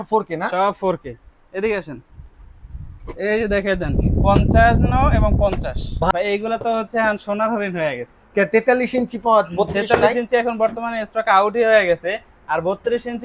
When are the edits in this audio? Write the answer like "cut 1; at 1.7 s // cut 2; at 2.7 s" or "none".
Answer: cut 1; at 6.1 s